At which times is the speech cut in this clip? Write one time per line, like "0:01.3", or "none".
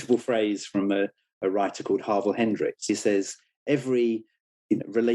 0:02.8